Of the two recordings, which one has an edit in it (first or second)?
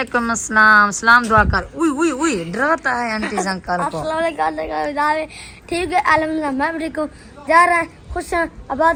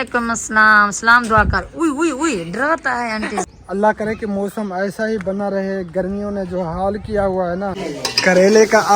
second